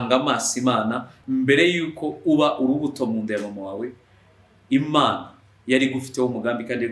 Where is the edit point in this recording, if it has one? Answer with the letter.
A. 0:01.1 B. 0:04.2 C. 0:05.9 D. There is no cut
A